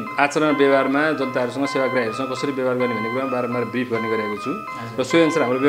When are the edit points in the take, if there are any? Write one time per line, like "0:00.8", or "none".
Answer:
none